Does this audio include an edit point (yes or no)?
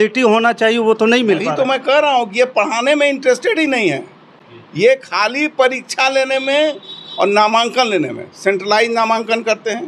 no